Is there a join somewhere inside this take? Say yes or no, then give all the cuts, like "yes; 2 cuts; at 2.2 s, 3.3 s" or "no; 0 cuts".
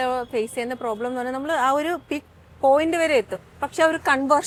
no; 0 cuts